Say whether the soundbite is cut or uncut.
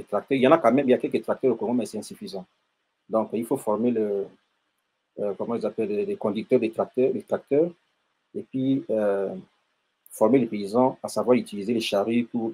uncut